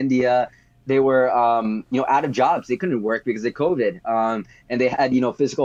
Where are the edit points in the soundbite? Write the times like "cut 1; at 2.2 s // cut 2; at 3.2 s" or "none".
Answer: none